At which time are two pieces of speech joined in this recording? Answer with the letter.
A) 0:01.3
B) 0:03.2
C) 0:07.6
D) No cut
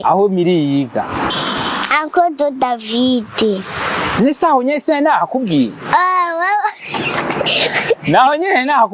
A